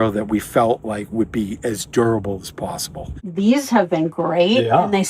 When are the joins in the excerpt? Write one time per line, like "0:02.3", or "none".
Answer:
0:03.2